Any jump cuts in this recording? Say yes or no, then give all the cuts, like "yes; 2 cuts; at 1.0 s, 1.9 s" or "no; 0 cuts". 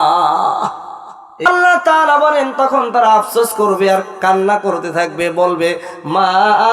yes; 1 cut; at 1.4 s